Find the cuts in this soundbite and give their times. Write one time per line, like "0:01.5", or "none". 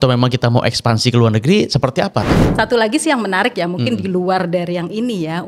0:02.4